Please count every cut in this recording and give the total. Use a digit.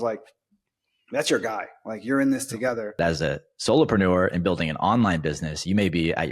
1